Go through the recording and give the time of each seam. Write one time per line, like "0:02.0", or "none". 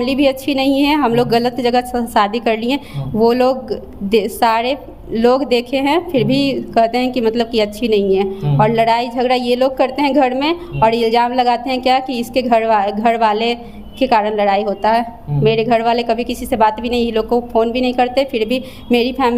none